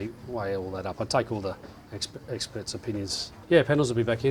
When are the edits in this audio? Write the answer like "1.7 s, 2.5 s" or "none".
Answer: 3.3 s